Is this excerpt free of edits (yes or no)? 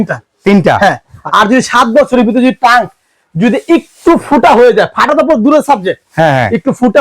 no